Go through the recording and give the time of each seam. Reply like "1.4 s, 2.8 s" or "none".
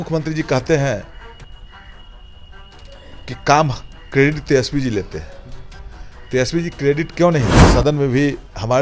7.6 s